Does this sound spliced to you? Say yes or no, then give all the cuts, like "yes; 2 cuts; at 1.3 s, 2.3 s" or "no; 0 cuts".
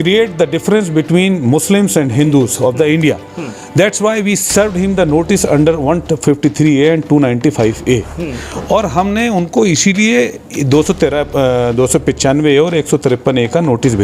no; 0 cuts